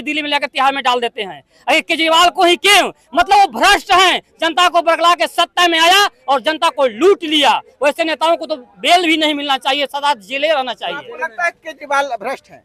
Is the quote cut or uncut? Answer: uncut